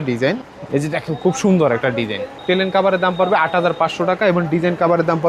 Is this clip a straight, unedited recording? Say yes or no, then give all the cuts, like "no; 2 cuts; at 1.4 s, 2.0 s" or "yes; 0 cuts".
yes; 0 cuts